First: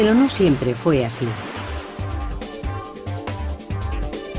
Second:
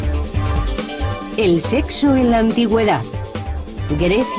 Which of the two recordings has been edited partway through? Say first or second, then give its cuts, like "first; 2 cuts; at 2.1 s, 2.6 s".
second; 1 cut; at 3.2 s